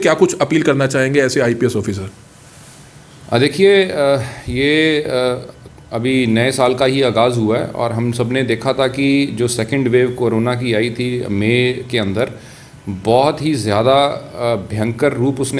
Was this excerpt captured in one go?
yes; 0 cuts

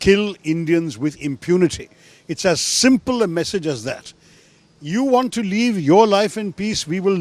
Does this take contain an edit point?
no; 0 cuts

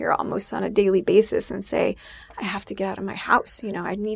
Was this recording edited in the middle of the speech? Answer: no; 0 cuts

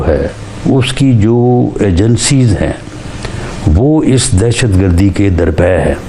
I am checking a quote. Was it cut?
no; 0 cuts

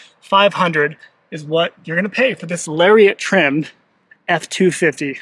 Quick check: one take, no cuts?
yes; 0 cuts

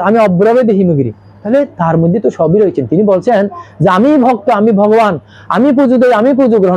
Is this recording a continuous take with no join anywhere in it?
no; 1 cut; at 1.3 s

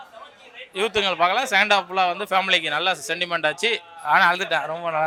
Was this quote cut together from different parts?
no; 0 cuts

